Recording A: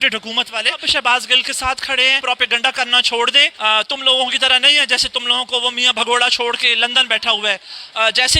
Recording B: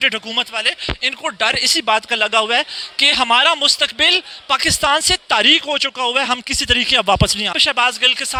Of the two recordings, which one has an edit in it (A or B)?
A